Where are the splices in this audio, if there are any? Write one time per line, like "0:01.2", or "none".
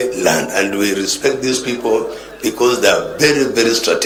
none